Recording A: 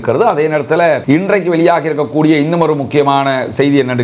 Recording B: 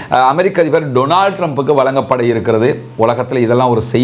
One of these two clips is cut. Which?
A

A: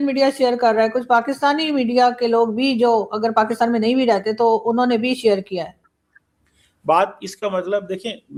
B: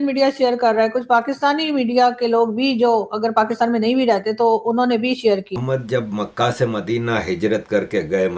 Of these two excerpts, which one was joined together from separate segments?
B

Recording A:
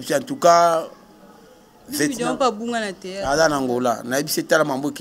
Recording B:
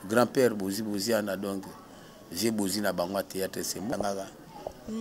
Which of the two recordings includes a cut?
B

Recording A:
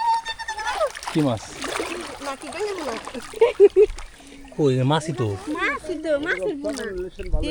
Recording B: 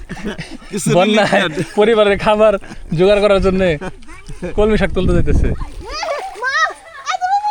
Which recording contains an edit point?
B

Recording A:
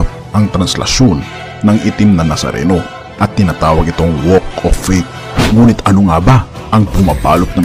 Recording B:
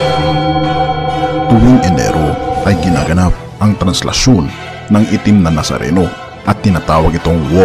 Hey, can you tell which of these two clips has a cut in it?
A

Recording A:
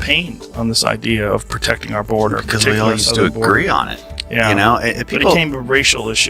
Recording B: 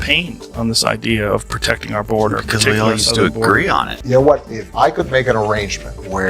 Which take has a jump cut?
B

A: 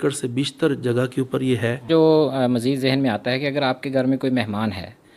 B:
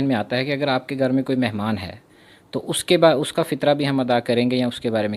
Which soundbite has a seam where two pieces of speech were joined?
A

